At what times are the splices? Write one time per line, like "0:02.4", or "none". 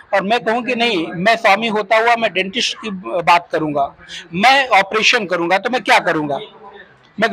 none